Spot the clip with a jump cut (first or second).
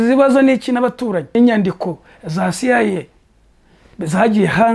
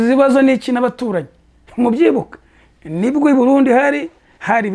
first